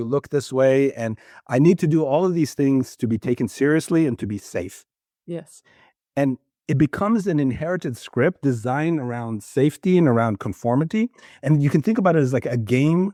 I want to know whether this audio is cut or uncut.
uncut